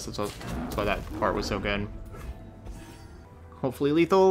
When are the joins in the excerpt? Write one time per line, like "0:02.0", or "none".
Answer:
0:03.3